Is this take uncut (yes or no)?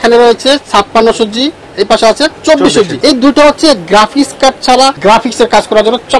no